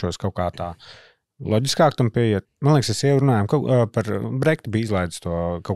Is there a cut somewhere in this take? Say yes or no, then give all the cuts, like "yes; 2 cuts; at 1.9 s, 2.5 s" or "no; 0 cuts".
yes; 1 cut; at 2.5 s